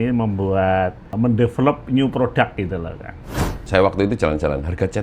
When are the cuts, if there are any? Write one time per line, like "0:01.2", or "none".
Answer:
0:01.0
0:03.7